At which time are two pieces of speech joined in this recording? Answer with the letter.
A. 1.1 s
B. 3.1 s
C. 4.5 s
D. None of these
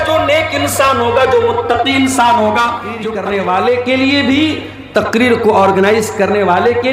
B